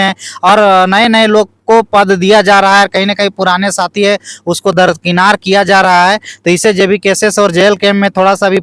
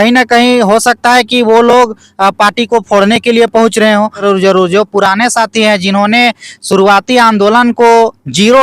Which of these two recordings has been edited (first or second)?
second